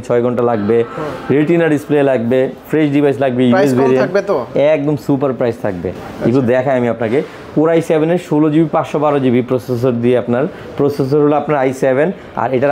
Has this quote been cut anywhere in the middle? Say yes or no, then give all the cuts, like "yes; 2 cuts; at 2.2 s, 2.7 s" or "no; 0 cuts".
no; 0 cuts